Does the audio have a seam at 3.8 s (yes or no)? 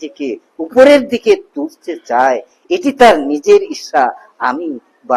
no